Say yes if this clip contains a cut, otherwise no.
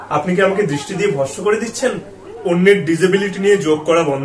no